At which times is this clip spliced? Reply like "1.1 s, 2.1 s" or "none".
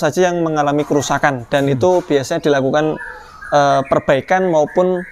none